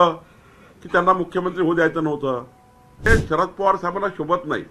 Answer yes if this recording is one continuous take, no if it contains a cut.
no